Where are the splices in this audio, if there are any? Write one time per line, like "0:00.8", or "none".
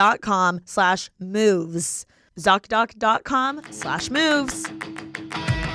0:04.6

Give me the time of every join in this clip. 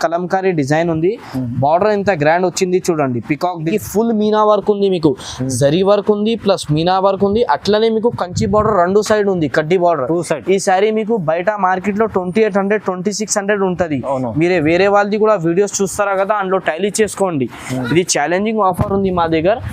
0:03.7

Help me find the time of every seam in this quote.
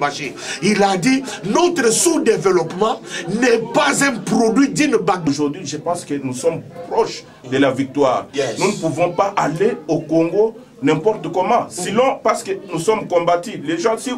0:05.3

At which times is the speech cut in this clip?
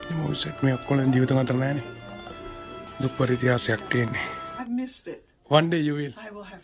0:04.4

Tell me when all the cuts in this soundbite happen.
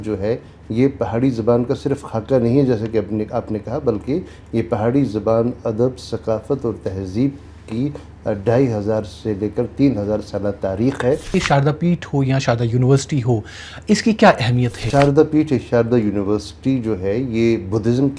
0:11.3
0:14.8

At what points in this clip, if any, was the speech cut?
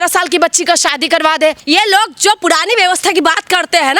0:01.6

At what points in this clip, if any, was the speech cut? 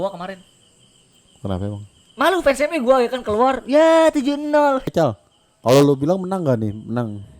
0:04.9

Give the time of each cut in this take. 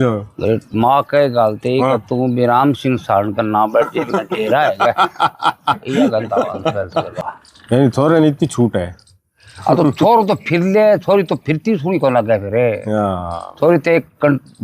0:07.2
0:09.0

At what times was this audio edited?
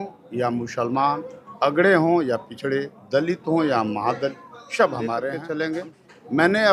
0:05.4

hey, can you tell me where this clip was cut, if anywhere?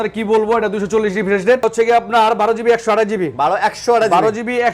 0:01.6

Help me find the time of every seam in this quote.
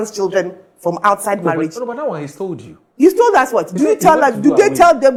none

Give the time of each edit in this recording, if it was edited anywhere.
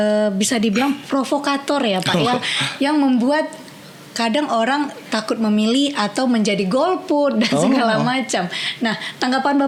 none

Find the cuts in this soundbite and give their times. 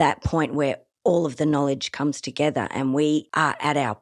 none

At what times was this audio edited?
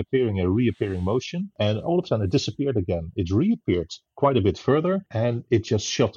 0:01.4
0:05.1

